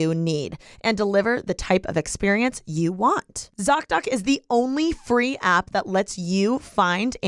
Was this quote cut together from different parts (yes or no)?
no